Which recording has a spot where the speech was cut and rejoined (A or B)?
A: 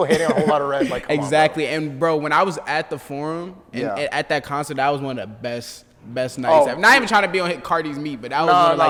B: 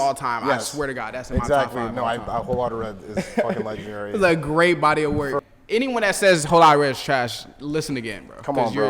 B